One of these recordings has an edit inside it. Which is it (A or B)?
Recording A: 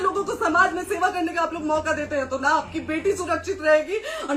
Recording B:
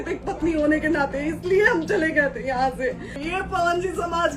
B